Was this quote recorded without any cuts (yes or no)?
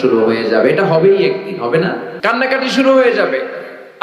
no